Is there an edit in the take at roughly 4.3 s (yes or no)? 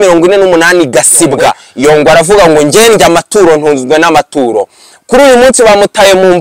no